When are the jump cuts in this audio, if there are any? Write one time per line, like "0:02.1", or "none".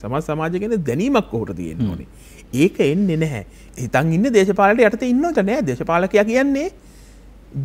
0:03.6